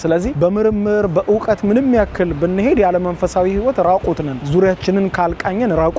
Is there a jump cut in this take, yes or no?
no